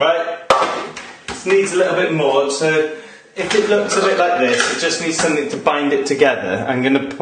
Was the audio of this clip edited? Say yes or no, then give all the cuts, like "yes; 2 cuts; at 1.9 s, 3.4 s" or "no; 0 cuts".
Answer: no; 0 cuts